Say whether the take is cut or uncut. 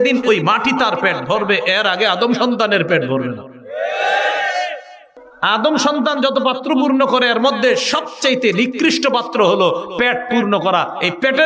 cut